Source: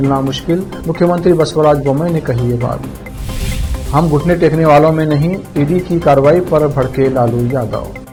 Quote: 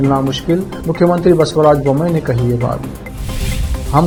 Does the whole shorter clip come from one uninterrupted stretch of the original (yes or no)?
yes